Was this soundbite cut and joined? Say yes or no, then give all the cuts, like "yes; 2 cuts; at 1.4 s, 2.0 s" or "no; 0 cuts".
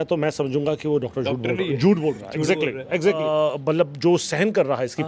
yes; 1 cut; at 3.3 s